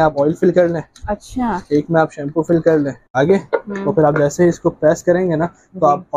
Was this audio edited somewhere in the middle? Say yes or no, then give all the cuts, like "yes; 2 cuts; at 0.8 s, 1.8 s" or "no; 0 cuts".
yes; 1 cut; at 3.1 s